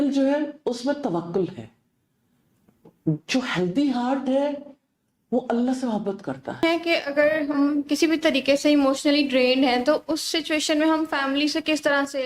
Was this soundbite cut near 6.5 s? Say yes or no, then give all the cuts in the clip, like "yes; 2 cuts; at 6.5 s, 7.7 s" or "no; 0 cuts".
yes; 1 cut; at 6.5 s